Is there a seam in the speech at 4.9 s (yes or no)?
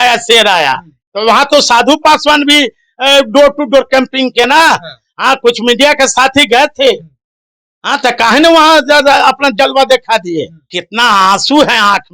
no